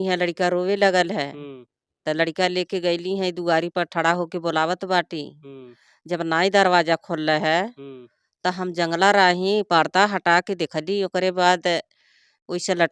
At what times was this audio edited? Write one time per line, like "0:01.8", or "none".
none